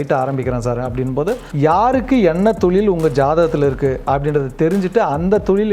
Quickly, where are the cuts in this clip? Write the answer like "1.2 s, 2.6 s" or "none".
1.5 s